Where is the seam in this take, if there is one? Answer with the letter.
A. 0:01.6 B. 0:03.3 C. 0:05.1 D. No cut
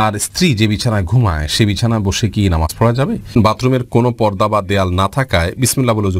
B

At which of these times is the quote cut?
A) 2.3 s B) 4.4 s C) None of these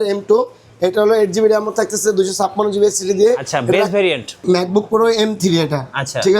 B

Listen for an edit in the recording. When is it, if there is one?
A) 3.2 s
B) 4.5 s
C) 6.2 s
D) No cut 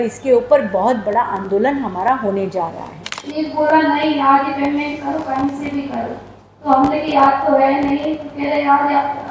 A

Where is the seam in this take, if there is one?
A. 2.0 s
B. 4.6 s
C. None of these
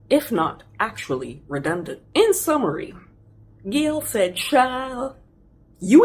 A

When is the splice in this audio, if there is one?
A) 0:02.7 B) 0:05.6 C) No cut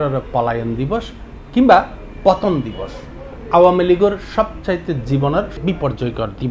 B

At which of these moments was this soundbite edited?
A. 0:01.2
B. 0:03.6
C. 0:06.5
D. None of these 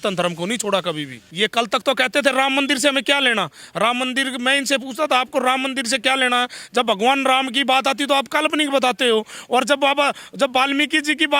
A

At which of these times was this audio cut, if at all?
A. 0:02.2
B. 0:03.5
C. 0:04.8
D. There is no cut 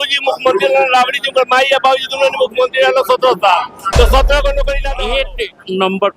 C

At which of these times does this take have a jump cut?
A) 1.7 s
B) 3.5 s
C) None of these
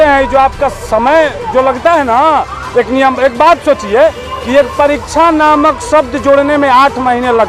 C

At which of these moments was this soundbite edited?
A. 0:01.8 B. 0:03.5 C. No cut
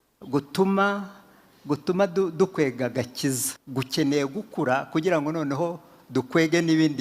B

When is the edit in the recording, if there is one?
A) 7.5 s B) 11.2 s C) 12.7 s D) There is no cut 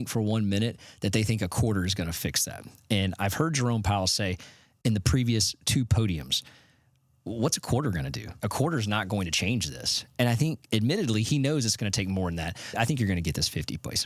C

